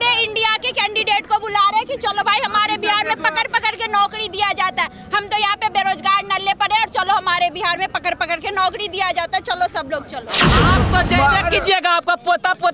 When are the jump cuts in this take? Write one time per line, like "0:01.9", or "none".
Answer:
0:10.4